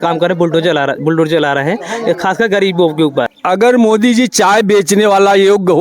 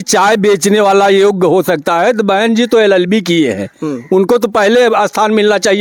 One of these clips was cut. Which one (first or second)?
first